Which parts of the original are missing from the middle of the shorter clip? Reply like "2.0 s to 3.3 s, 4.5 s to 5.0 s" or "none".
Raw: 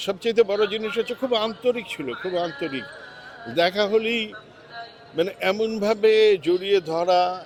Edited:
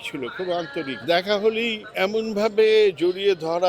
2.8 s to 3.4 s, 4.4 s to 5.4 s